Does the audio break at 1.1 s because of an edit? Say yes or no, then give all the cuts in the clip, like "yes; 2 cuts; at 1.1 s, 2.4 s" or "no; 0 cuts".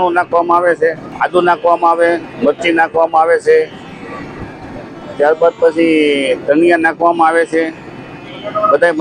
yes; 1 cut; at 1.1 s